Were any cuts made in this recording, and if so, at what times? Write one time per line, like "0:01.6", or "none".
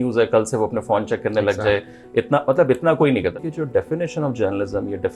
0:03.3

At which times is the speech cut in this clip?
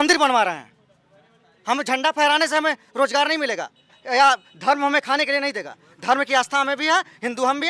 none

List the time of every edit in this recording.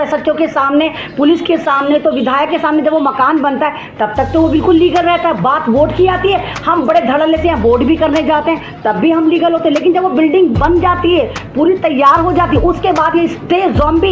none

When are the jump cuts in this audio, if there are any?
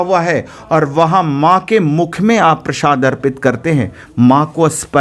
none

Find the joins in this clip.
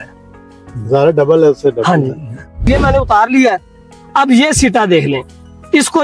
0:02.6

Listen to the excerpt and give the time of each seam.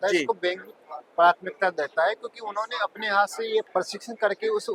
none

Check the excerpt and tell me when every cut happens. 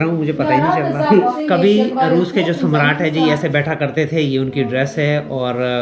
0:01.3

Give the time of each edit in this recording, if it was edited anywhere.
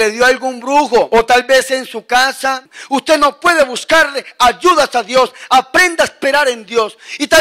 0:01.1
0:02.7

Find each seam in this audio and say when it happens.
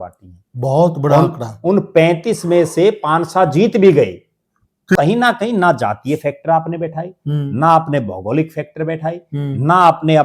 0:05.0

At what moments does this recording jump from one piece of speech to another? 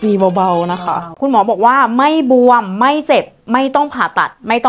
0:01.1

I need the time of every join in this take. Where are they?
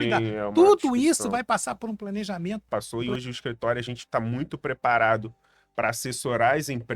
0:02.7

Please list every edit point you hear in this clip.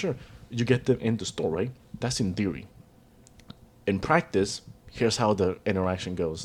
none

